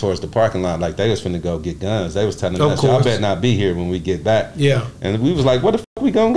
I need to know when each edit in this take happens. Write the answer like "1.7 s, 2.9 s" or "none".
none